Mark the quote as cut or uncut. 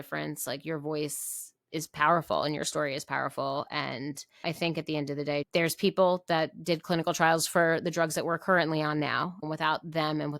cut